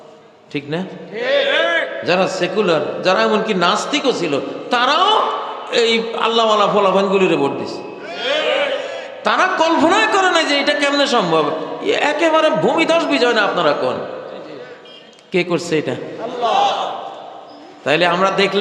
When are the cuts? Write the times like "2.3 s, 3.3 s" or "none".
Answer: none

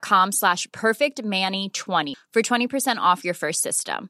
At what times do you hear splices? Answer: 2.1 s

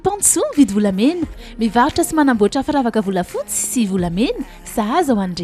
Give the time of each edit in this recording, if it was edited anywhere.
none

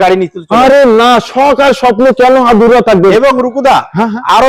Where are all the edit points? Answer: none

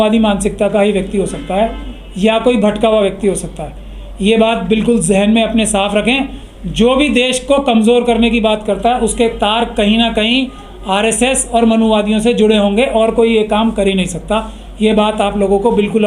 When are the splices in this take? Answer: none

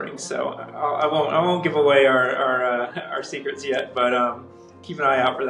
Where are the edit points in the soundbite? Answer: none

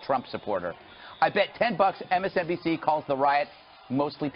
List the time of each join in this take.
2.3 s

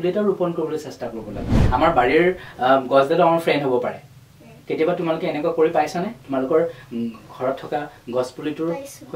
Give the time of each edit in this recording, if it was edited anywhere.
1.6 s

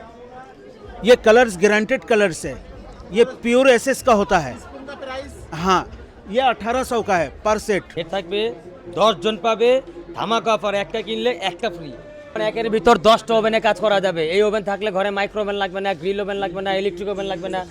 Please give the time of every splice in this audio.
8.0 s, 12.4 s

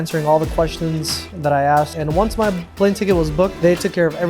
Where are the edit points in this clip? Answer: 2.0 s, 3.5 s

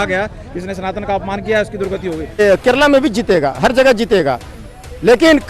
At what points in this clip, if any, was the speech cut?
2.4 s

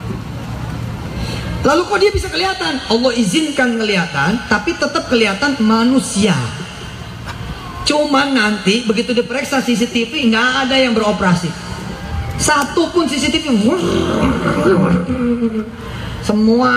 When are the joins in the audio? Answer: none

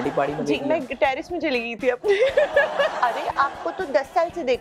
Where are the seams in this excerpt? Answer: 3.0 s

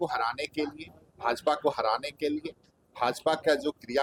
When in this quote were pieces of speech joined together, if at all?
none

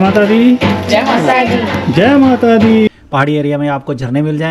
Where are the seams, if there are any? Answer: 2.9 s

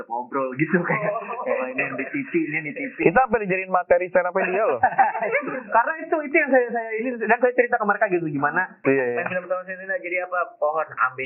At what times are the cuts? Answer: 8.8 s

